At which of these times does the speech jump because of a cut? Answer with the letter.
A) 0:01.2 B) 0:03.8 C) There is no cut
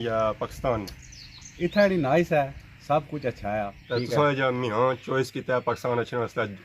B